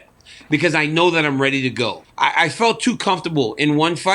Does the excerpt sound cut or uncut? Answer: cut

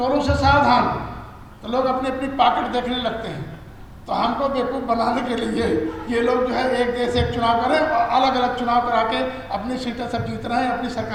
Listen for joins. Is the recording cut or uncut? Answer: uncut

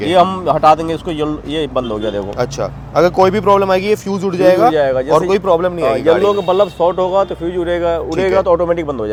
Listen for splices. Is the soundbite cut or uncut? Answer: uncut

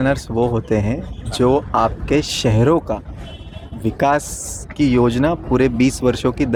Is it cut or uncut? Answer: uncut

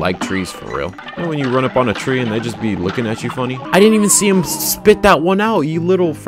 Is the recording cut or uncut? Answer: cut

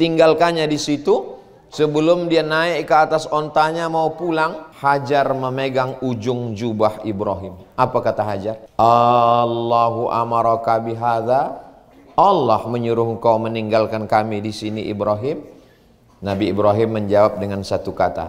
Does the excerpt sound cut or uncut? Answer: cut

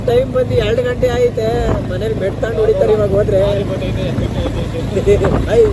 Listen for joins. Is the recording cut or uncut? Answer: uncut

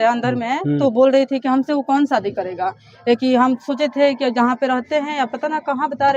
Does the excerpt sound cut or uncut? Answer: uncut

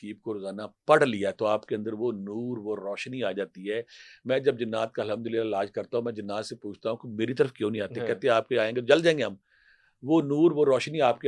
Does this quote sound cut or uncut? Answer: uncut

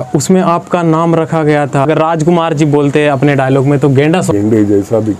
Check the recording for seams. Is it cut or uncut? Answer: cut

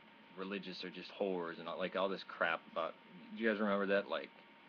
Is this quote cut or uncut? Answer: cut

